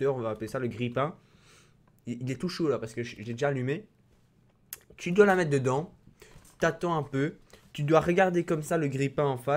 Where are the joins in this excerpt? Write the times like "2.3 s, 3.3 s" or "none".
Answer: 8.3 s